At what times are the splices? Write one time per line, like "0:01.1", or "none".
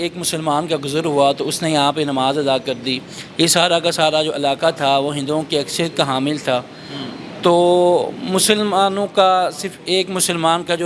none

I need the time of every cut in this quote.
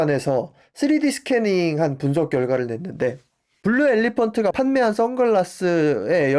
none

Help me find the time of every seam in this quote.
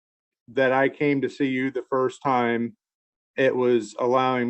none

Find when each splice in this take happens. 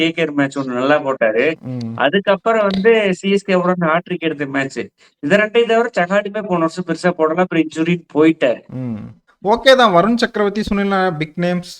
0:09.1

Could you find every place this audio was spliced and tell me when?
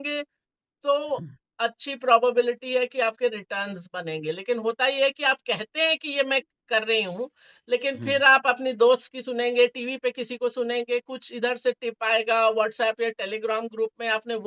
none

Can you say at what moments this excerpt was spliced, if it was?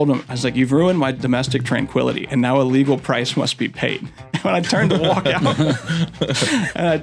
none

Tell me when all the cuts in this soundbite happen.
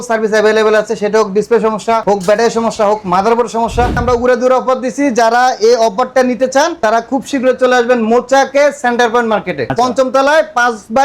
0:04.0
0:09.7

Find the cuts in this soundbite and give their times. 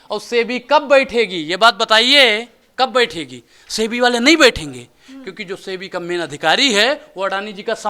none

